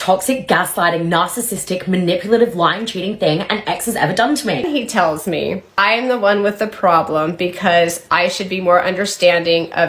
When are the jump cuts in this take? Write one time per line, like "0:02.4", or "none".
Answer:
0:04.6
0:05.8